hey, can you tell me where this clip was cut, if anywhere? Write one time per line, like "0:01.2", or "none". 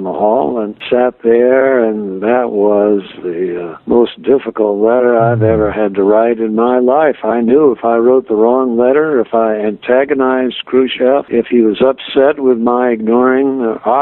none